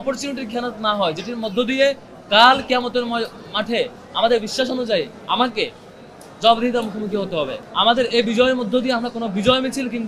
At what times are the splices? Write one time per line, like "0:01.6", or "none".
0:07.6